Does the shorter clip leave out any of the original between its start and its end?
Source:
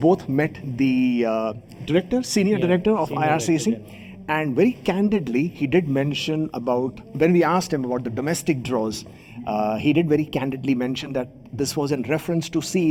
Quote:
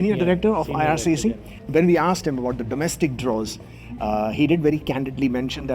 yes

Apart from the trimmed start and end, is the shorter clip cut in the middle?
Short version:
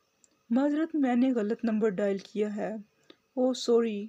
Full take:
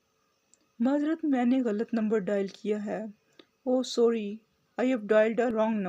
no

